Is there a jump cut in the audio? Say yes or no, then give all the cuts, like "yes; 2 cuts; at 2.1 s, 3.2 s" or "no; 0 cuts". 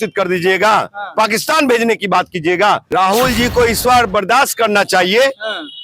yes; 1 cut; at 2.8 s